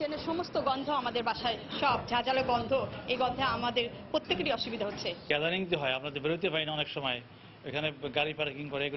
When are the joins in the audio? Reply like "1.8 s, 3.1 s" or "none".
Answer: 5.1 s